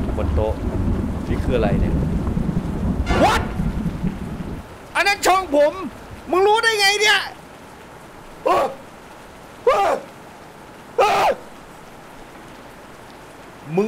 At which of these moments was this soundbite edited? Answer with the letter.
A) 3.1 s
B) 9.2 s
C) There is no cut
A